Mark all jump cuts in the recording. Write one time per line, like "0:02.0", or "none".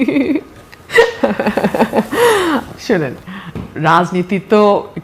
none